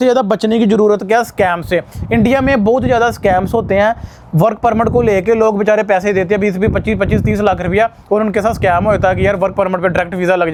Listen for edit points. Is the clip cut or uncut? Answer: uncut